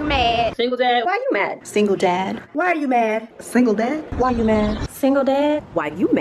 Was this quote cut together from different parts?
no; 0 cuts

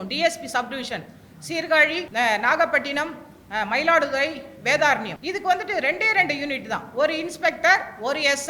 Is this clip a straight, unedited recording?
no; 2 cuts; at 2.1 s, 5.2 s

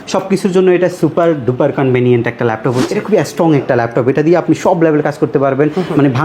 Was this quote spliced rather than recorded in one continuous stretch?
yes; 1 cut; at 2.8 s

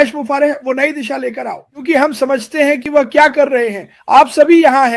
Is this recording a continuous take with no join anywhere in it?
no; 1 cut; at 1.8 s

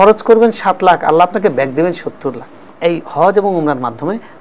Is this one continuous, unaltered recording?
no; 1 cut; at 2.6 s

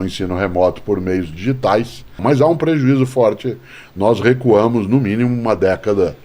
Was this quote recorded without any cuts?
no; 1 cut; at 2.1 s

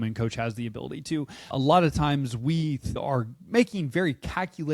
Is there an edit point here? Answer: yes; 2 cuts; at 1.5 s, 3.0 s

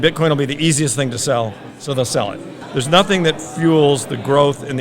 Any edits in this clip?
yes; 1 cut; at 2.5 s

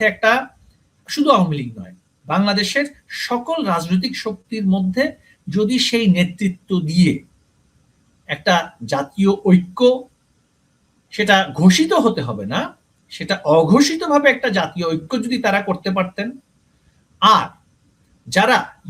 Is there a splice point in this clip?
no; 0 cuts

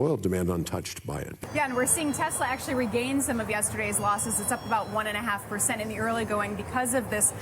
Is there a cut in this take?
yes; 1 cut; at 1.3 s

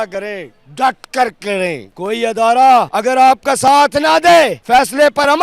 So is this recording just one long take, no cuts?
no; 3 cuts; at 1.9 s, 2.9 s, 4.6 s

